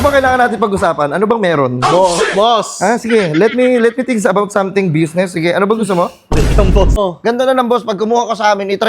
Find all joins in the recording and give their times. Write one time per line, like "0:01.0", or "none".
0:07.0

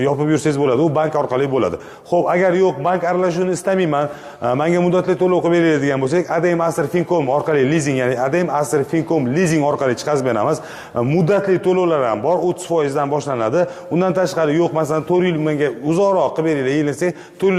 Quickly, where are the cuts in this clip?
none

